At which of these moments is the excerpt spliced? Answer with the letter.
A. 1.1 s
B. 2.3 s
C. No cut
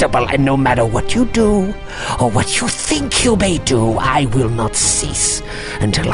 C